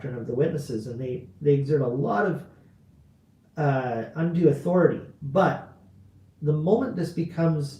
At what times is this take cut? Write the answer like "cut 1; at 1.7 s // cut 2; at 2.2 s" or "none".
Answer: cut 1; at 5.1 s